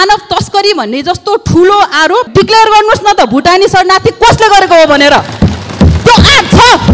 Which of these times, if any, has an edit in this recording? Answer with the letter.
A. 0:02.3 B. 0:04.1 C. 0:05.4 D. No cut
A